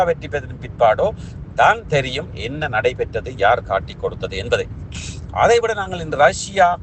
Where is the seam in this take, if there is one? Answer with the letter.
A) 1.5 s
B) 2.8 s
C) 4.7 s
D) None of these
D